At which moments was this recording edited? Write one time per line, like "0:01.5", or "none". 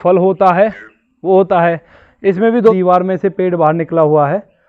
0:02.7